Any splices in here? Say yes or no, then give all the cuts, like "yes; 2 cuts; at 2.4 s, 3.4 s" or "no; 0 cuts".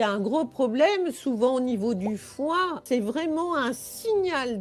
yes; 1 cut; at 2.8 s